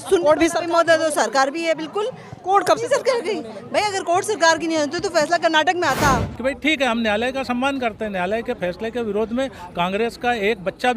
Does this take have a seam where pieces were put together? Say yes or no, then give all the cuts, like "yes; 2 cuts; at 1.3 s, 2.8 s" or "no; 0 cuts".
yes; 1 cut; at 6.3 s